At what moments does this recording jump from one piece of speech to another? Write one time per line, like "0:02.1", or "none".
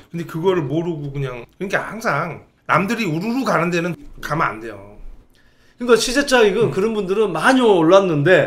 0:01.4
0:02.5
0:03.9